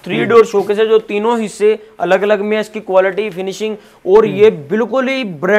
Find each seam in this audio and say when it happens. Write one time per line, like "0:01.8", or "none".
none

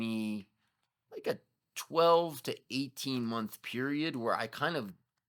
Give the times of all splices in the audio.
none

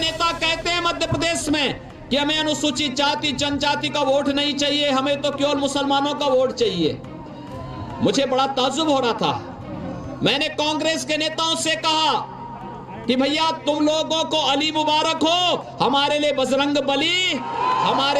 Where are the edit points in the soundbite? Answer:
none

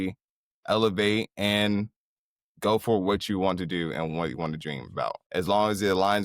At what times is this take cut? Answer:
0:04.9

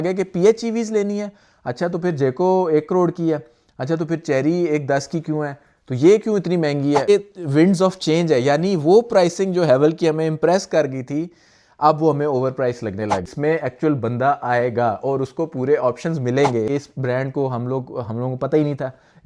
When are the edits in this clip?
0:07.1
0:13.3
0:16.7

